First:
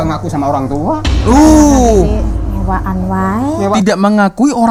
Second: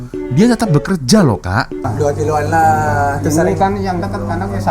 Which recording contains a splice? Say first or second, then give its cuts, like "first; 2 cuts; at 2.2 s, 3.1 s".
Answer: second; 1 cut; at 1.9 s